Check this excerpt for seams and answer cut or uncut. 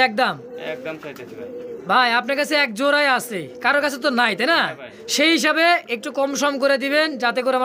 uncut